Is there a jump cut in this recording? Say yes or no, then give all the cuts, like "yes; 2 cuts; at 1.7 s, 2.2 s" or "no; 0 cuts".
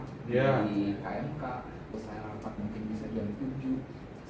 yes; 1 cut; at 1.9 s